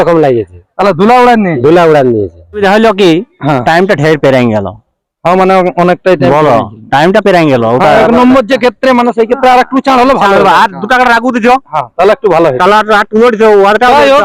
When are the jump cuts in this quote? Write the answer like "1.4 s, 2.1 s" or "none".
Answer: 2.6 s